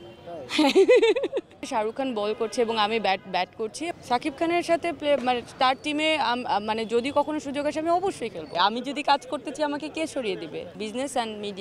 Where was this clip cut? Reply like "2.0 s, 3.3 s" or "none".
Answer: 1.6 s, 3.8 s, 8.5 s, 10.8 s